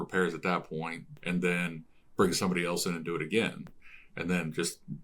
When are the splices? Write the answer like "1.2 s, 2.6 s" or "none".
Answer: 1.1 s, 3.7 s